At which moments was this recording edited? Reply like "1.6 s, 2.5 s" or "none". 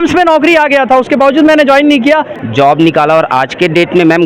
2.4 s